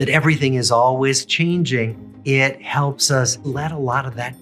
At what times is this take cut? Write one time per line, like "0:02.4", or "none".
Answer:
0:02.1
0:03.5